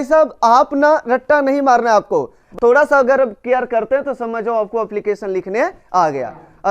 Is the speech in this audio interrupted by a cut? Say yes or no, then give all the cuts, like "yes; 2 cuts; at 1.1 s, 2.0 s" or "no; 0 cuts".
yes; 1 cut; at 2.6 s